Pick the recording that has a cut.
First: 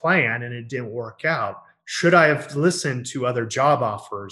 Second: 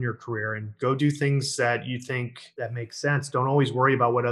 second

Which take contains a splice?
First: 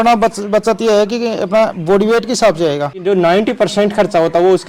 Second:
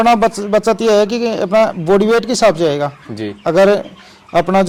first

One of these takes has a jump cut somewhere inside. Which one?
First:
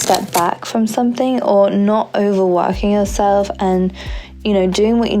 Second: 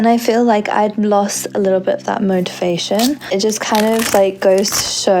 second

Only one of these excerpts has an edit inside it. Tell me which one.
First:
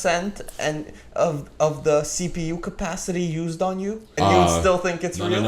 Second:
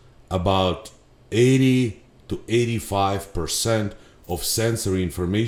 first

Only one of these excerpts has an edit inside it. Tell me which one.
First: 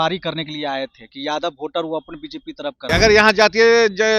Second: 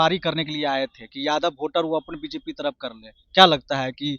first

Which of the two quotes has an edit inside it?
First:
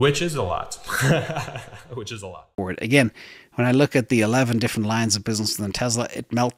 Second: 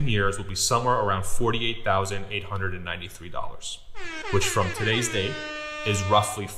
first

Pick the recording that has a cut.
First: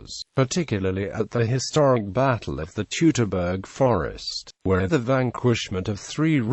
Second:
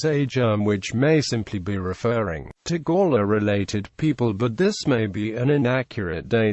first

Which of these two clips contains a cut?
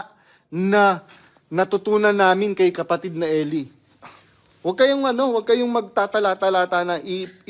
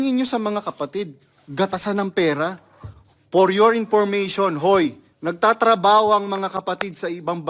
second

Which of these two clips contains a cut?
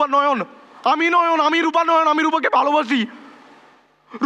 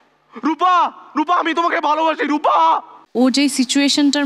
second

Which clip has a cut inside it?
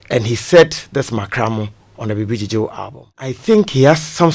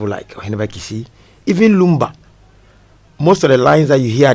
first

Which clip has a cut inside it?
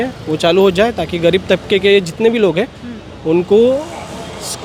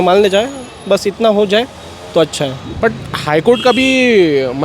second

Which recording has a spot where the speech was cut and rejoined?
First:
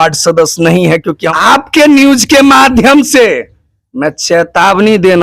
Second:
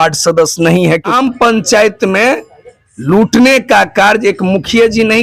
first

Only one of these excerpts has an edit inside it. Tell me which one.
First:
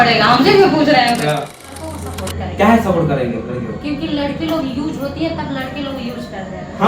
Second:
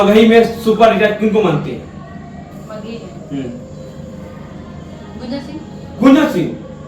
first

